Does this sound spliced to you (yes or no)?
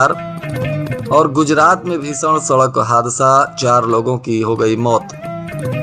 no